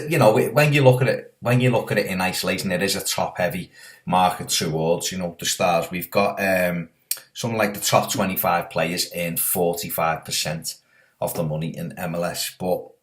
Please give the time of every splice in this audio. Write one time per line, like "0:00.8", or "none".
0:02.5